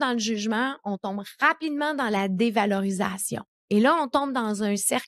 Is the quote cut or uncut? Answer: uncut